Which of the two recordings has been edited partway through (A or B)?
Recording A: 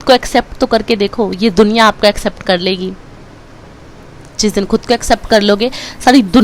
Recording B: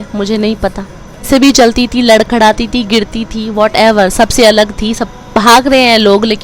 B